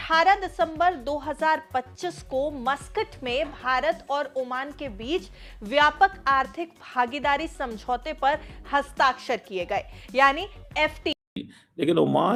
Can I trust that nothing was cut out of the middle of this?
yes; 0 cuts

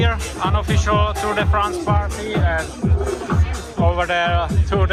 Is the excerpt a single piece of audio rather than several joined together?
yes; 0 cuts

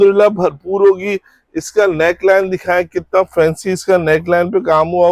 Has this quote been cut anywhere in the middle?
no; 0 cuts

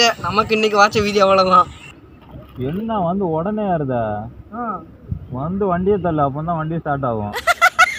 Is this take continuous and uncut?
yes; 0 cuts

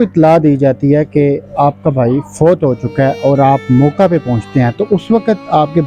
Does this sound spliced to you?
no; 0 cuts

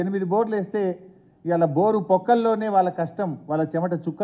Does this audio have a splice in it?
no; 0 cuts

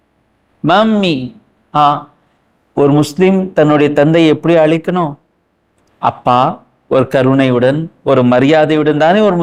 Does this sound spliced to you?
no; 0 cuts

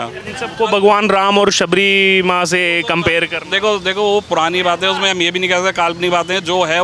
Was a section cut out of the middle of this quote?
no; 0 cuts

